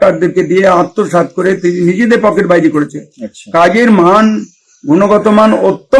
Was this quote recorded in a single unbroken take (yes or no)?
yes